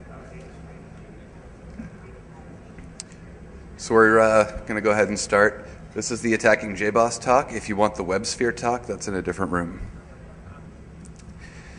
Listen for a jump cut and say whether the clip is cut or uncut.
uncut